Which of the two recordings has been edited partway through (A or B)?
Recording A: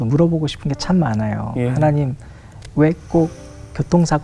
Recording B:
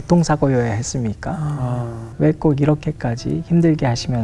B